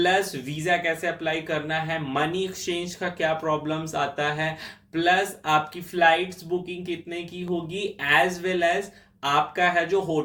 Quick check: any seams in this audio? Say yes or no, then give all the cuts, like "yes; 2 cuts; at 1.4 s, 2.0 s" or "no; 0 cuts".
no; 0 cuts